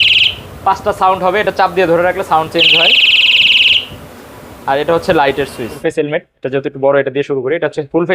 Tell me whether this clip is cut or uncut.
cut